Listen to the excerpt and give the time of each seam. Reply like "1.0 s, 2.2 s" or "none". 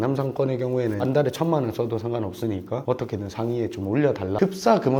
none